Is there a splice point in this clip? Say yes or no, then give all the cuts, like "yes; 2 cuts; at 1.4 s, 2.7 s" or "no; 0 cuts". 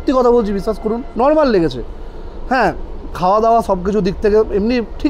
yes; 1 cut; at 1.0 s